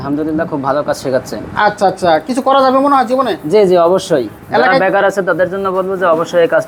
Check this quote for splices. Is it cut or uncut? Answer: uncut